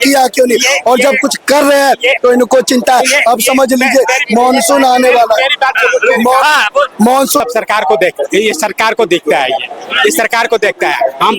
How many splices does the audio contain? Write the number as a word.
one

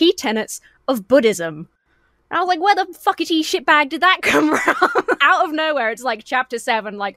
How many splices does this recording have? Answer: one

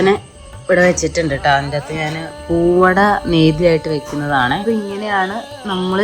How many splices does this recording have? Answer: two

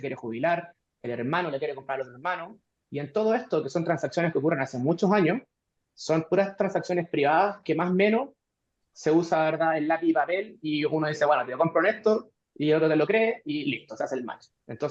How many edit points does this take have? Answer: zero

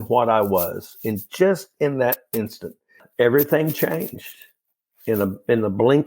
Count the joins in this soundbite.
one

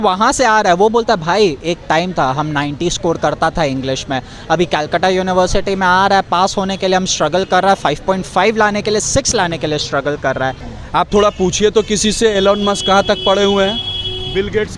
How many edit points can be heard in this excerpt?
one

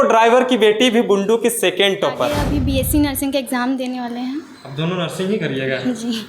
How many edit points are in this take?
one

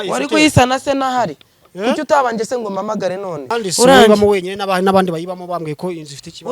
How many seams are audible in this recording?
one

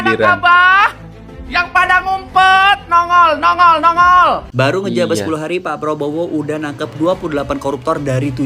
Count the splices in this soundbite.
one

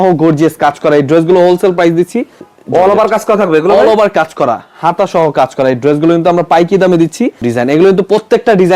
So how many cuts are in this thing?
two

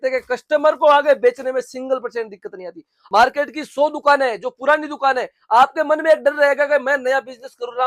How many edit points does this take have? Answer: one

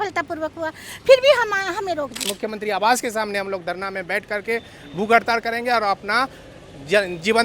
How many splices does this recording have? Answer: one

